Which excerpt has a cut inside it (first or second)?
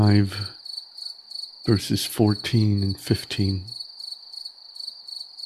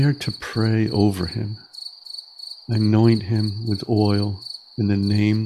first